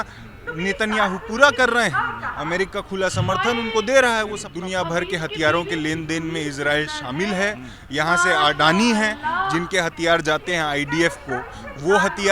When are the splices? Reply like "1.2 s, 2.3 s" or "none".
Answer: 4.5 s